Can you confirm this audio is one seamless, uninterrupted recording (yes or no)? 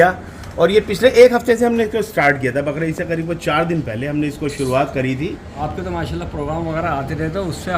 no